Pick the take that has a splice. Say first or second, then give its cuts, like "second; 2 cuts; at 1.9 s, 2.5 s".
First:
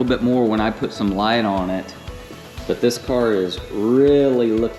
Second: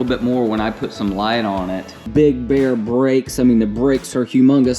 second; 1 cut; at 2.1 s